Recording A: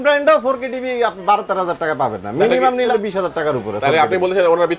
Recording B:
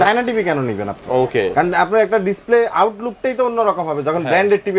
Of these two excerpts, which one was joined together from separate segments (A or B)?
A